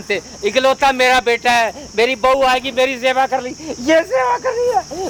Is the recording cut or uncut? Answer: uncut